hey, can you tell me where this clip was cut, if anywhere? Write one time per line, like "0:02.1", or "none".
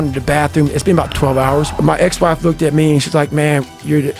0:01.1